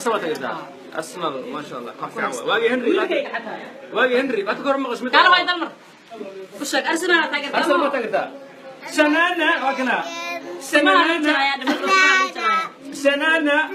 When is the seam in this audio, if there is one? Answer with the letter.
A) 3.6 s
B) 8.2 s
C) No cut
C